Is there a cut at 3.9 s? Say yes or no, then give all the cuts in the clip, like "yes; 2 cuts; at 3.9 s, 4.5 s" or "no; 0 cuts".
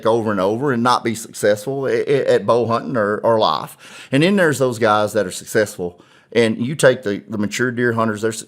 yes; 1 cut; at 3.9 s